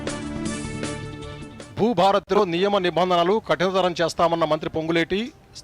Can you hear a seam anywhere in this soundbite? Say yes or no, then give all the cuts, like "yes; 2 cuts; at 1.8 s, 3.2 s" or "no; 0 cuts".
yes; 1 cut; at 1.4 s